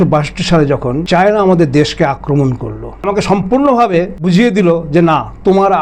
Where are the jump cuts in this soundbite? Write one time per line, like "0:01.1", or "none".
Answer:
0:01.0
0:03.0
0:04.2